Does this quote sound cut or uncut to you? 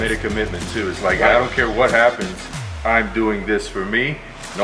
uncut